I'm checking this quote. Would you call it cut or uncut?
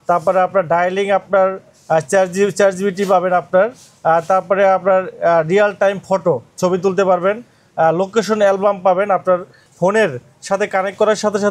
uncut